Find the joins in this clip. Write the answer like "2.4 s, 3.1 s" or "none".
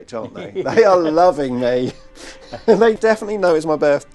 3.0 s